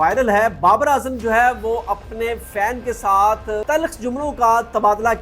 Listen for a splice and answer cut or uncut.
cut